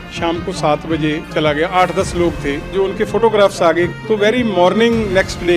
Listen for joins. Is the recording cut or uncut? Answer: cut